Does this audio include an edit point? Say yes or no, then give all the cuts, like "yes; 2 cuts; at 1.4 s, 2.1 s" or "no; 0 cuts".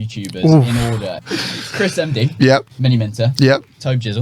yes; 2 cuts; at 1.2 s, 2.7 s